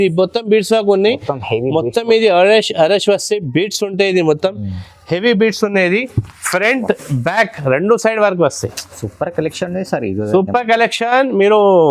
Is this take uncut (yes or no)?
yes